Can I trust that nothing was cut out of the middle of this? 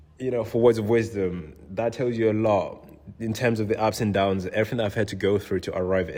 yes; 0 cuts

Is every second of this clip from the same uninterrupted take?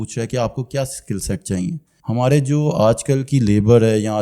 no; 1 cut; at 1.9 s

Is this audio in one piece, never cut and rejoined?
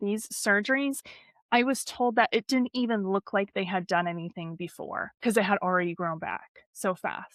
yes; 0 cuts

